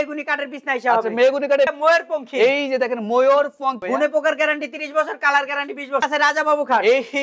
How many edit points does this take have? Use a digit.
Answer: 3